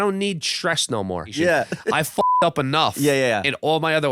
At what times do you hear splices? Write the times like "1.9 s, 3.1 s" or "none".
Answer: 1.3 s